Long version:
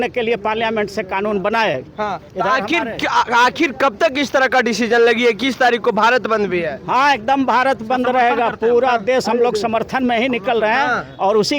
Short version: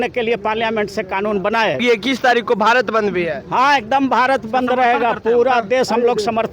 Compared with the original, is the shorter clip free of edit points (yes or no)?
no